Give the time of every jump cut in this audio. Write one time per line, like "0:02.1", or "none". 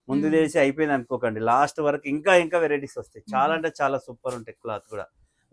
none

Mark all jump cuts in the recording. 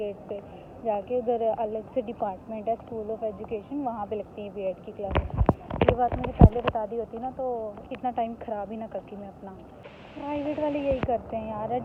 none

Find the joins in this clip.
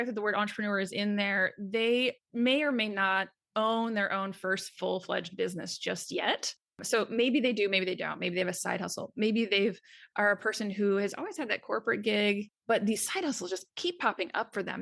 0:06.7
0:12.5

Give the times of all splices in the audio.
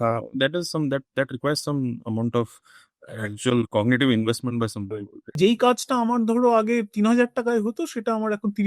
0:05.3

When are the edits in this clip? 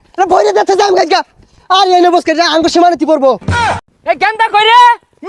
0:03.8

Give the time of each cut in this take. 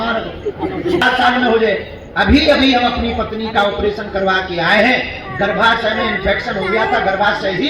0:01.0

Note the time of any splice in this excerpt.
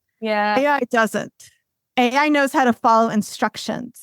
0:01.6

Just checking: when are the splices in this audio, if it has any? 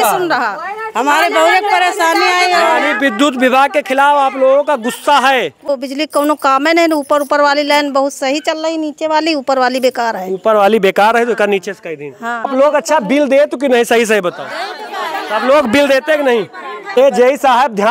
0:05.7
0:12.5
0:16.9

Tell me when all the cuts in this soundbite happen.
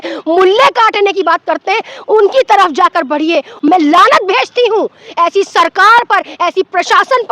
0:03.5

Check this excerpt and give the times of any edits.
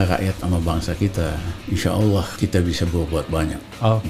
0:01.5
0:02.3

